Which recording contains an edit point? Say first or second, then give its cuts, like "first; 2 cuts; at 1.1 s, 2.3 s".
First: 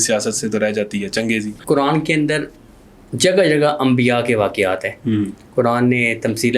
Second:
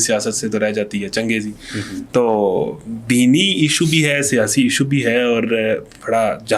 first; 1 cut; at 1.5 s